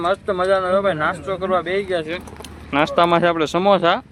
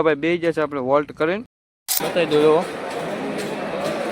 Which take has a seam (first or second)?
second